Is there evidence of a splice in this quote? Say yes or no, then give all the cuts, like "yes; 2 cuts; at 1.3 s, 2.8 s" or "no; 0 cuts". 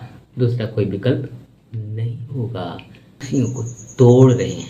yes; 1 cut; at 3.2 s